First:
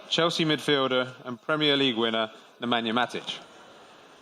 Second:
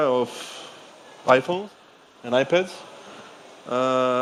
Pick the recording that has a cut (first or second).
first